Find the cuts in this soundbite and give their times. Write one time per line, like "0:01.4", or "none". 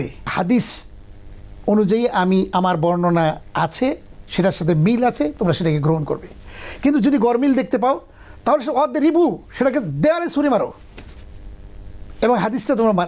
none